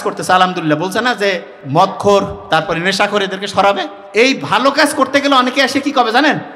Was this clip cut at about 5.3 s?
no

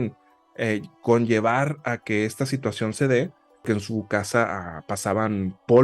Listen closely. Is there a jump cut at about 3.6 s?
yes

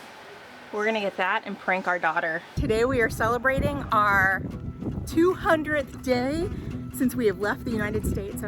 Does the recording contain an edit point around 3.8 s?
no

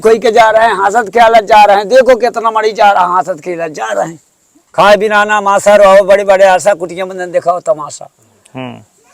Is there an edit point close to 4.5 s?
yes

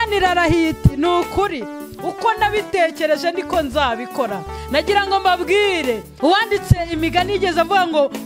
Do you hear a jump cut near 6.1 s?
yes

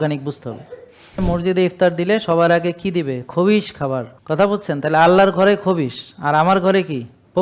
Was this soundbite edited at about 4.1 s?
yes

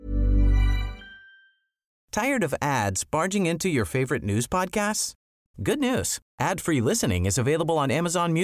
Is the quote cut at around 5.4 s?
no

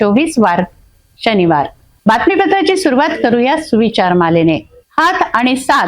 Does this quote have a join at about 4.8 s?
no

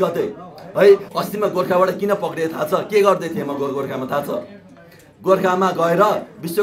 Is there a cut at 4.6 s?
no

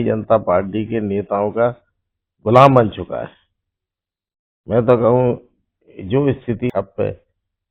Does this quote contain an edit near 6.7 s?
yes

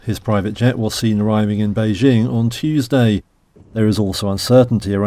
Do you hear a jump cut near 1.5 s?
no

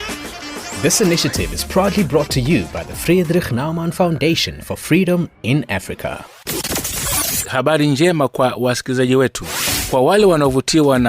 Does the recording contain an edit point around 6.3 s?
yes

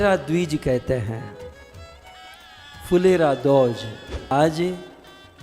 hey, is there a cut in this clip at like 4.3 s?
yes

